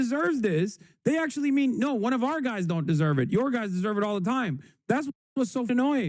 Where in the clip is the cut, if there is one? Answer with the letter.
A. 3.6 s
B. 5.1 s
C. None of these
B